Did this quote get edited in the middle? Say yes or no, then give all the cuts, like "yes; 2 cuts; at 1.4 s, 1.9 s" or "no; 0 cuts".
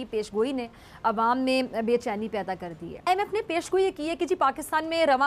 no; 0 cuts